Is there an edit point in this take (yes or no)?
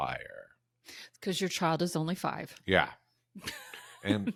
no